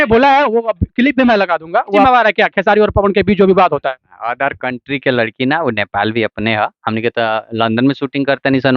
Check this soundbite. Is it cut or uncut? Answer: cut